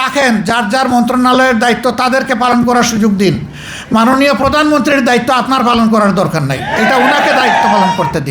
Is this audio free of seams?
yes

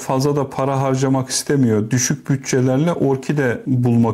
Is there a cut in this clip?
no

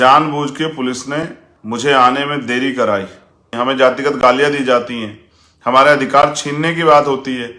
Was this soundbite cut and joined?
yes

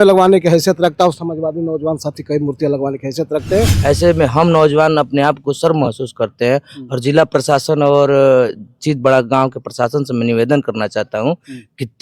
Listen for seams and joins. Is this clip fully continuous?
no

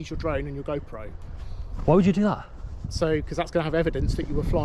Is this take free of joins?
yes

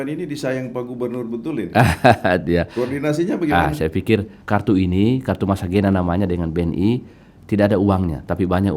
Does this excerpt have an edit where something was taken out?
yes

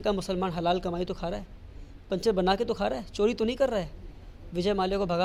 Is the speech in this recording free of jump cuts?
yes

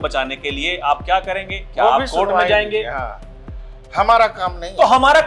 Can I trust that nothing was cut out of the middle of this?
yes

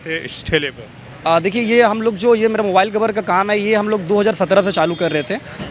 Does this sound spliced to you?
no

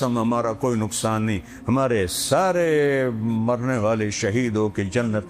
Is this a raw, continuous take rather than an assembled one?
yes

